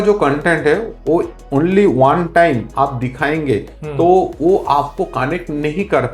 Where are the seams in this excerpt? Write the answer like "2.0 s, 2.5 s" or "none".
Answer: 1.4 s